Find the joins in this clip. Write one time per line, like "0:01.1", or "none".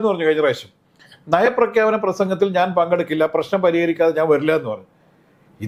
none